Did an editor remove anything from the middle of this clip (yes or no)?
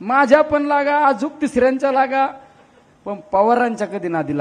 no